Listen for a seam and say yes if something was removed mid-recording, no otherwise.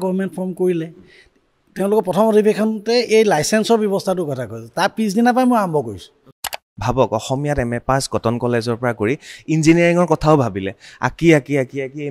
yes